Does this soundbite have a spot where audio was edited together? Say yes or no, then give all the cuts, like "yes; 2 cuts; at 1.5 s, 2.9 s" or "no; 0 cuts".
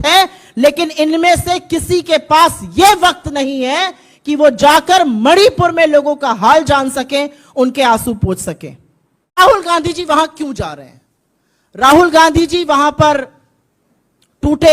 yes; 1 cut; at 9.4 s